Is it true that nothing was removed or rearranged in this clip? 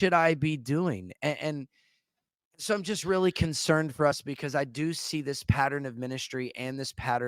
yes; 0 cuts

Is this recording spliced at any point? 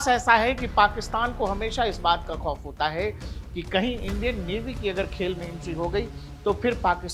no; 0 cuts

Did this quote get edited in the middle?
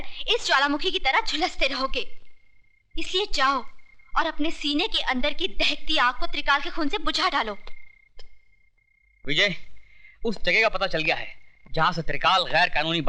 no; 0 cuts

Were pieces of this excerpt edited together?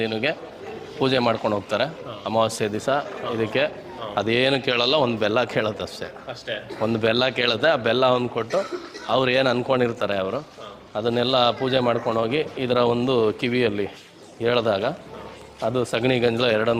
no; 0 cuts

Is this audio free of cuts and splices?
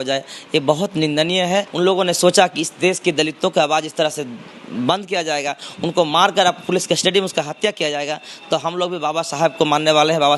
no; 1 cut; at 1.7 s

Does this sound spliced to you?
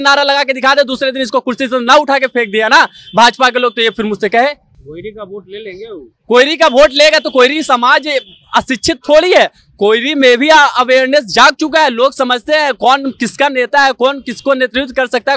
no; 0 cuts

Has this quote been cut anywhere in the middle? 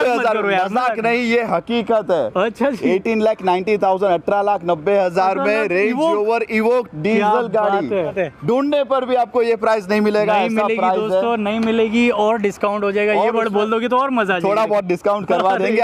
no; 0 cuts

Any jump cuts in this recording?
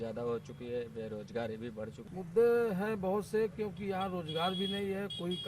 yes; 1 cut; at 2.0 s

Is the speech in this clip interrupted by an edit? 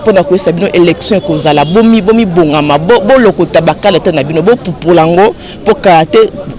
no; 0 cuts

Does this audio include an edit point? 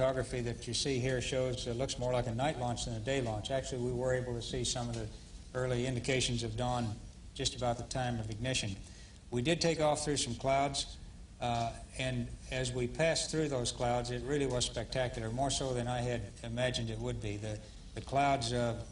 yes; 1 cut; at 9.8 s

